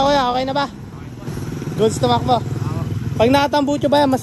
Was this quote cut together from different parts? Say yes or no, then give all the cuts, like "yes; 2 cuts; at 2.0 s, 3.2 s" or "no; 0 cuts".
no; 0 cuts